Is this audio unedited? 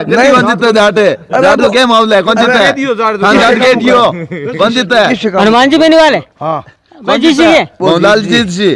yes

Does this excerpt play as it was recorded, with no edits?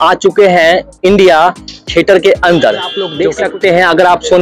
no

